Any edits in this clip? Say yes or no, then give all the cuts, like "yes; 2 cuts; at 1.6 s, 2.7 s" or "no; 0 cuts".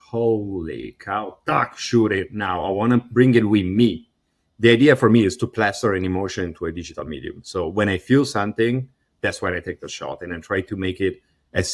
no; 0 cuts